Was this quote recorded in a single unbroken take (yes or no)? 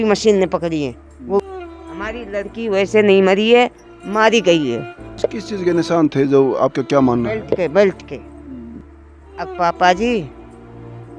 no